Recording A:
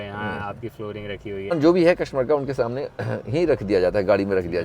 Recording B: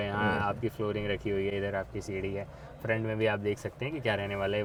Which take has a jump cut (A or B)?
A